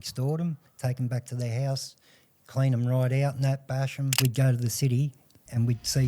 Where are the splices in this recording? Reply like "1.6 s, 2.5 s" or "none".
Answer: 4.2 s